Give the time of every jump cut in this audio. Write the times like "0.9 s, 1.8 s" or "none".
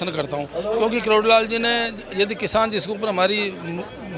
none